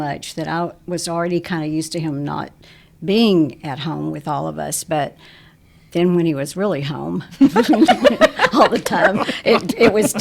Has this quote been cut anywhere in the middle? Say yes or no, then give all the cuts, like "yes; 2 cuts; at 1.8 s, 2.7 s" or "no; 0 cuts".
no; 0 cuts